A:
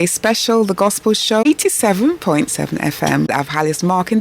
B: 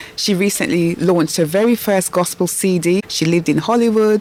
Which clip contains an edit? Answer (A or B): A